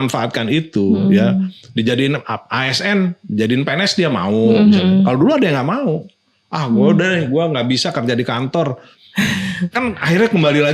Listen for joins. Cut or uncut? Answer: uncut